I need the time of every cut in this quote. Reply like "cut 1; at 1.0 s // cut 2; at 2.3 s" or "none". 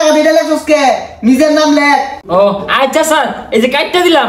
none